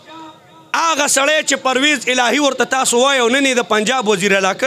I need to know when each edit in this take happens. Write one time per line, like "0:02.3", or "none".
none